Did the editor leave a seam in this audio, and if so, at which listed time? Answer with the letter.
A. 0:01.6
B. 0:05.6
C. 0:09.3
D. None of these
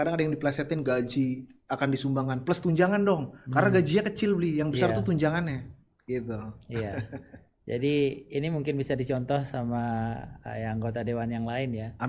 D